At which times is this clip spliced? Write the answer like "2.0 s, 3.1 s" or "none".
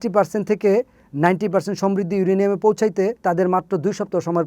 3.2 s